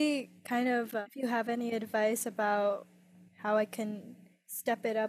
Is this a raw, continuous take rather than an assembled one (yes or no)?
yes